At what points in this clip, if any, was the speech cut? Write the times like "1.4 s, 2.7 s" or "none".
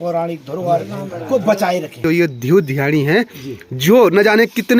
2.0 s